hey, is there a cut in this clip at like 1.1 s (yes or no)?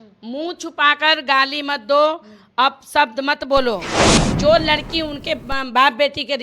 no